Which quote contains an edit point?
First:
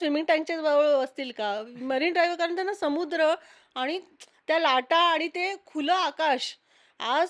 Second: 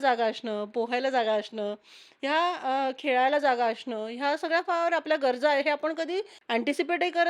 second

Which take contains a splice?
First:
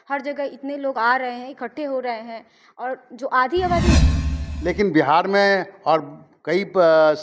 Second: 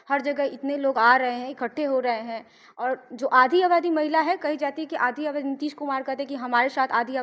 first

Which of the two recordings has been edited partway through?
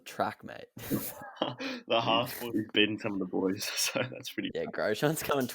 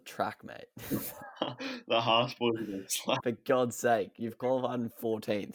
first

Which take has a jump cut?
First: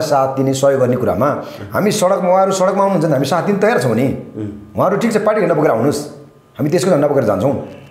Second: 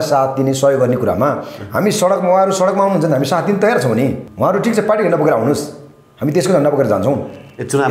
second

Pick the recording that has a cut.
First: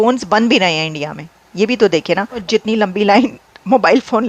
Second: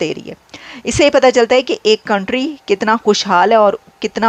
first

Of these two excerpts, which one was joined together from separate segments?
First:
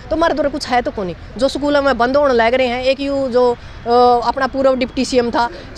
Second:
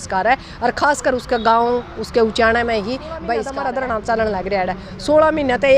second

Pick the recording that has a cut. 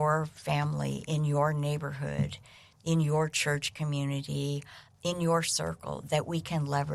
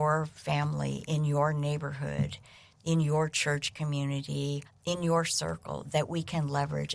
second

